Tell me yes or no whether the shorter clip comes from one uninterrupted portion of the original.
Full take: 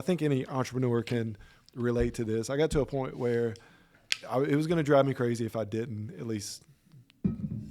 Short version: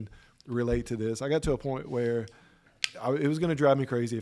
yes